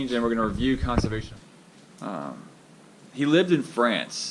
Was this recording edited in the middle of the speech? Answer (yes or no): yes